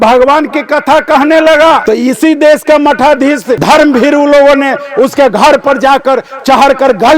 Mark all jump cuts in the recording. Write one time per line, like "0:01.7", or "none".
0:01.8
0:03.6